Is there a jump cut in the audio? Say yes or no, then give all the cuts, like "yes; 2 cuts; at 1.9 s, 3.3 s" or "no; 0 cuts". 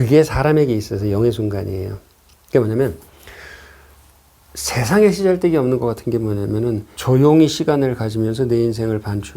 yes; 1 cut; at 6.9 s